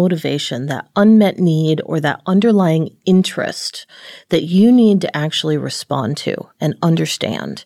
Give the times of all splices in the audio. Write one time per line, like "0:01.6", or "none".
none